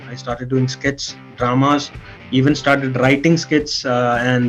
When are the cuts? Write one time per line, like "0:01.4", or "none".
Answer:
none

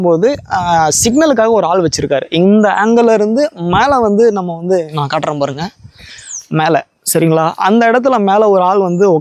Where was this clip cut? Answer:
none

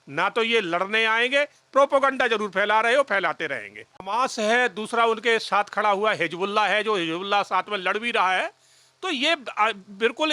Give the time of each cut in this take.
0:04.0

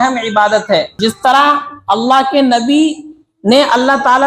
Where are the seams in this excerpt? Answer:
0:00.9

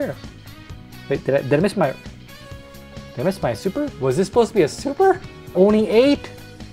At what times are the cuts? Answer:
0:03.9
0:05.4

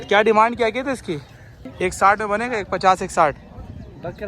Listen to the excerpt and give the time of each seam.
0:01.7

